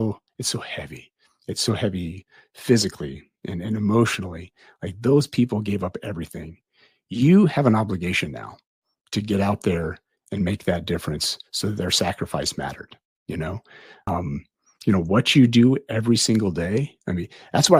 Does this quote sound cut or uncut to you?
cut